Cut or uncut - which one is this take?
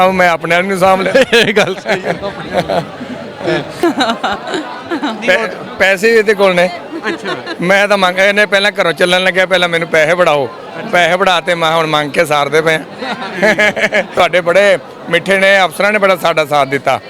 cut